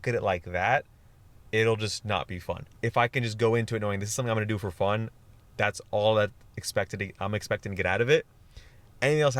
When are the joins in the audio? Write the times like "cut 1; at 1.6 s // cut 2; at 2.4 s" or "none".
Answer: cut 1; at 2.6 s